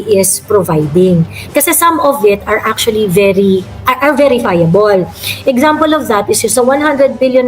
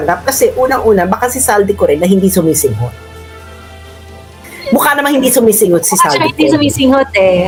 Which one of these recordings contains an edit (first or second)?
first